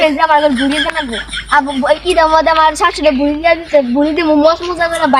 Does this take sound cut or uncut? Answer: uncut